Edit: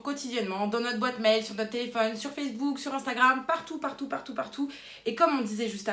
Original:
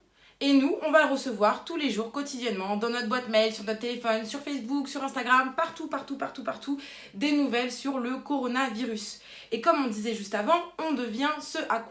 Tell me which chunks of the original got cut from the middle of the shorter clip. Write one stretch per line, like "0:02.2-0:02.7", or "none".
0:07.0-0:09.3